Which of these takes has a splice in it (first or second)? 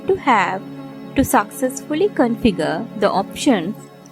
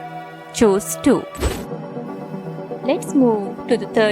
second